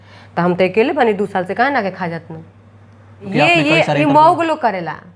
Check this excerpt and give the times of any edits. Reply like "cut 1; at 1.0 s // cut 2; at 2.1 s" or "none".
cut 1; at 3.3 s